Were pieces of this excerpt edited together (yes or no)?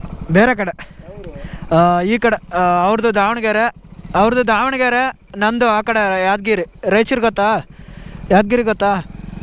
no